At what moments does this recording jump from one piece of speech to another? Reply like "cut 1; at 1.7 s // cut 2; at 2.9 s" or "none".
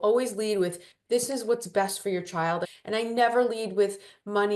cut 1; at 2.7 s